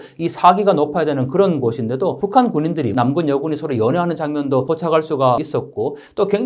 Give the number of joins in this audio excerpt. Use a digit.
0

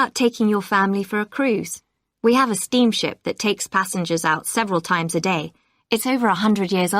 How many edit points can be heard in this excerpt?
0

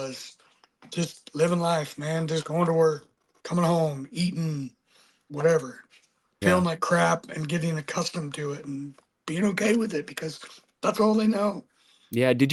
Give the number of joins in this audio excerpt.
0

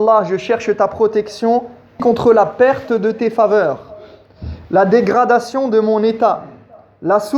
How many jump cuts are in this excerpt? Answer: 1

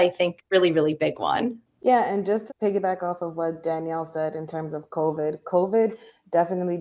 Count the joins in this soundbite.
1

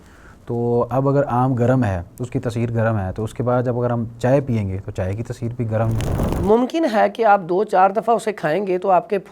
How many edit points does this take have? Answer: 1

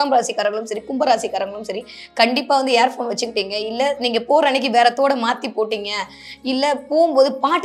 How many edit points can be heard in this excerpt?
0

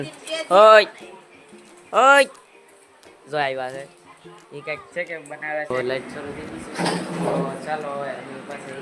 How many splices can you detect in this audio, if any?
1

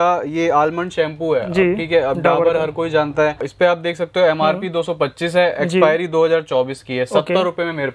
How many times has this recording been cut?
1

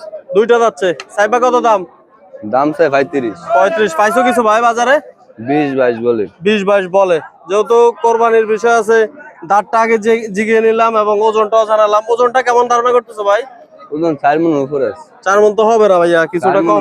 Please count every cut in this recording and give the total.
0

